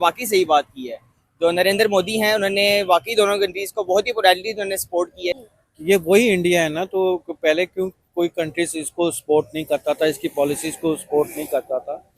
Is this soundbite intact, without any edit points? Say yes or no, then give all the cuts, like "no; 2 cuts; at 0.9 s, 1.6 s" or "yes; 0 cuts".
no; 1 cut; at 5.4 s